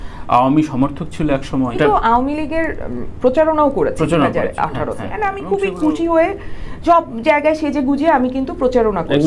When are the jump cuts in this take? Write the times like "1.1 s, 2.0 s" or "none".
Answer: 5.1 s